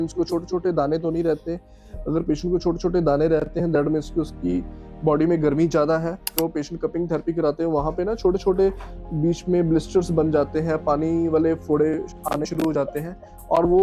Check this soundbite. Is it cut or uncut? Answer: cut